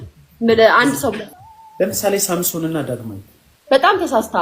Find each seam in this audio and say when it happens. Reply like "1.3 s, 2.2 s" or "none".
1.3 s